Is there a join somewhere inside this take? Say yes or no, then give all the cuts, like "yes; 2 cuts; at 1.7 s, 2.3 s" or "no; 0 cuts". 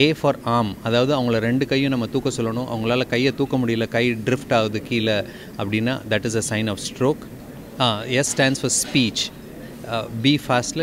no; 0 cuts